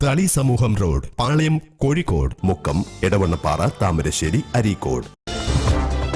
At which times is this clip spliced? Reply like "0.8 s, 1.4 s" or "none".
5.2 s